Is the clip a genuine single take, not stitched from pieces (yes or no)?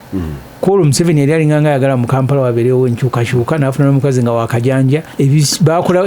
no